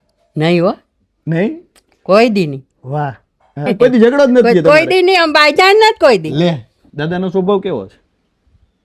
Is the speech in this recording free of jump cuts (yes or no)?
no